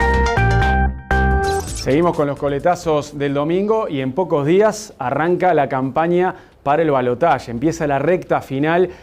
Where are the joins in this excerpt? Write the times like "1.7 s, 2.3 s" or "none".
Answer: 1.6 s